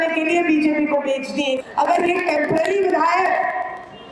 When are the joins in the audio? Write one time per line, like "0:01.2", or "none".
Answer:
0:01.6

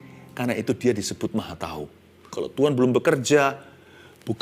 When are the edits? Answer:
0:02.4

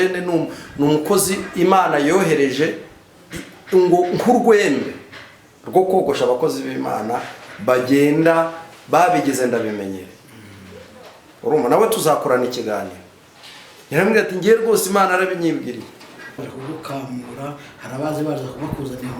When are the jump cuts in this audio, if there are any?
0:16.4

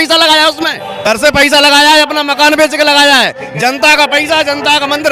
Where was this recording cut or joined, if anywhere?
0:01.1

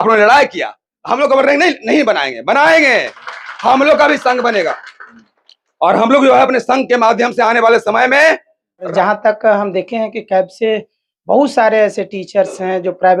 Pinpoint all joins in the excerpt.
0:08.9

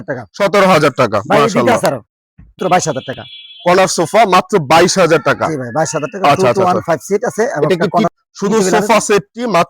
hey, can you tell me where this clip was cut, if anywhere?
0:02.6
0:08.1

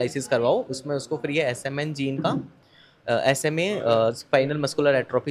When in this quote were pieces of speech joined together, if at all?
none

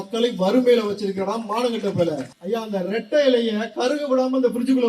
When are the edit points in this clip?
0:02.3

